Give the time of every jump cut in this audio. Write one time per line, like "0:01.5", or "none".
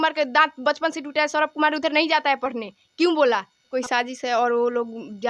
0:03.7

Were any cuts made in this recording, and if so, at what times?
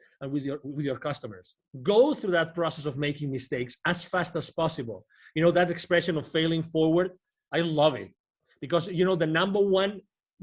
0:01.7

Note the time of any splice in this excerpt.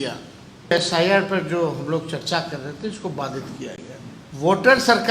0:00.7
0:04.2

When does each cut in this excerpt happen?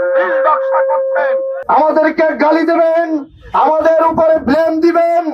0:01.6

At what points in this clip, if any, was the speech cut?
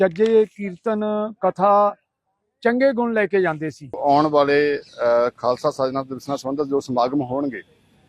0:04.0

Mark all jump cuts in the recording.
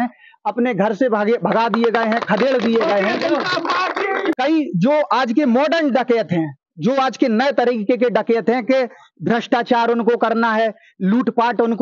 0:04.3

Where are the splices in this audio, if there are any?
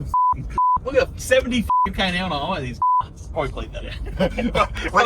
0:03.2

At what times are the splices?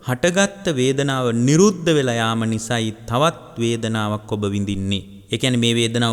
0:05.1

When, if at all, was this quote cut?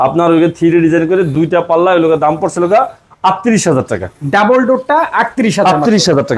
none

